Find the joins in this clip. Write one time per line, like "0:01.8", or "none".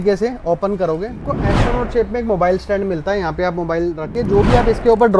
0:01.3
0:04.2

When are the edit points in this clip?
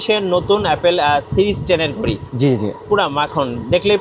none

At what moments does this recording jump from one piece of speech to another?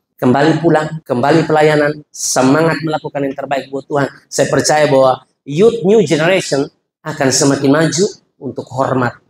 0:01.0

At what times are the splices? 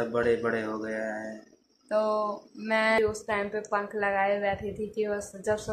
0:03.0

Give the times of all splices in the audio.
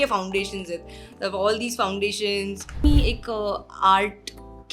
0:02.8

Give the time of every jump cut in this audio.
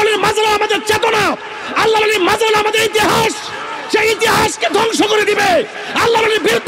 none

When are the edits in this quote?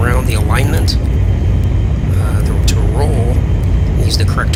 none

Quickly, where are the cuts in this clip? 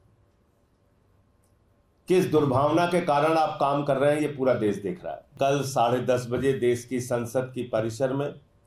0:05.3

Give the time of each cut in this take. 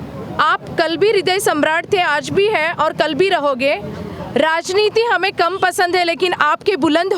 none

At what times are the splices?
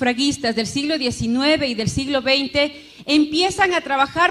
0:03.3

